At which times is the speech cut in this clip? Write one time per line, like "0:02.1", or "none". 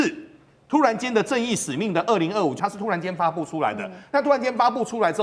0:02.5